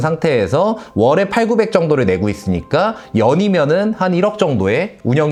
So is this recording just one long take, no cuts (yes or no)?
yes